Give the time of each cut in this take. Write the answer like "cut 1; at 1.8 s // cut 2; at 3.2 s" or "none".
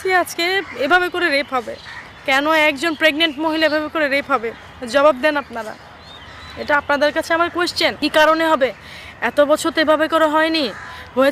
cut 1; at 8.0 s